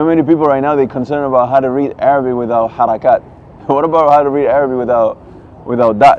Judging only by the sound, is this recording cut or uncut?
uncut